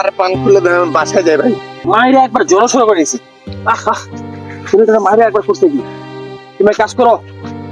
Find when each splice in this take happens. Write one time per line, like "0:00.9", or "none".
0:01.7